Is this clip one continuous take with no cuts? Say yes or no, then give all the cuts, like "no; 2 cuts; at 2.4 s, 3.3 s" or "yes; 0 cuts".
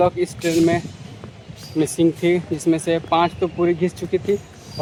yes; 0 cuts